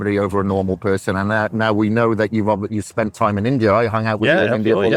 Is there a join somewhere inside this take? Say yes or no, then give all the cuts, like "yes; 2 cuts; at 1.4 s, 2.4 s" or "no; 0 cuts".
no; 0 cuts